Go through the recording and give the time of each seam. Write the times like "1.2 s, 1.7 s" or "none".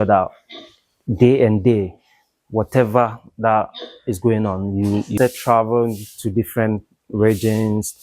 5.2 s